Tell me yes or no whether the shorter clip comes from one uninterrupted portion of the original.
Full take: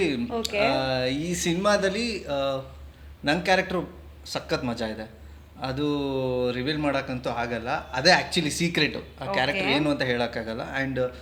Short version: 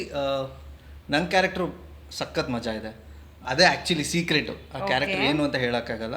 no